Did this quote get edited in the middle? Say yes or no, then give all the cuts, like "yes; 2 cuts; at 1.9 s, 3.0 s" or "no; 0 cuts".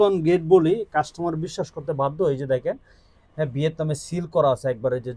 no; 0 cuts